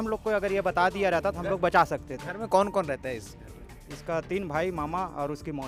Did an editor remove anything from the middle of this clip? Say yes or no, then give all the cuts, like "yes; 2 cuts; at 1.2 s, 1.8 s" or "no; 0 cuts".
no; 0 cuts